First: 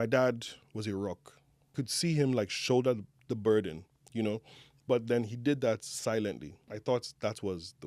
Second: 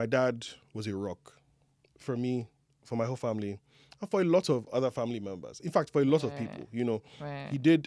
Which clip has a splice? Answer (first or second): first